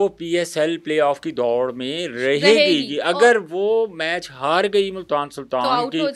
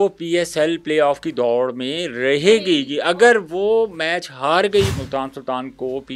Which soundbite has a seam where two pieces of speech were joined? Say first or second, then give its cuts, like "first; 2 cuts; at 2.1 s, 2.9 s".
second; 1 cut; at 5.0 s